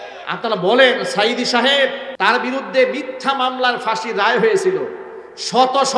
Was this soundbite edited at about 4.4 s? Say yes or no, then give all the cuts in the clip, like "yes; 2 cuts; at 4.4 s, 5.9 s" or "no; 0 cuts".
no; 1 cut; at 2.0 s